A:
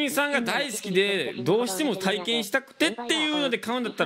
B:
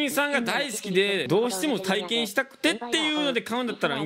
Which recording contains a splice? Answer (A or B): B